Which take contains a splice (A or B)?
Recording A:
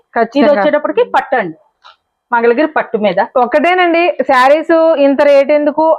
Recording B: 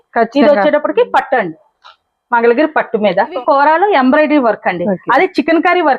B